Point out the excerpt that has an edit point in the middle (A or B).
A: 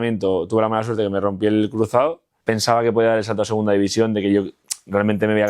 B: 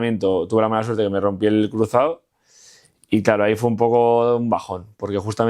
A